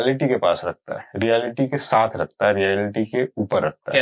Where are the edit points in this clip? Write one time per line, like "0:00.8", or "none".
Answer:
none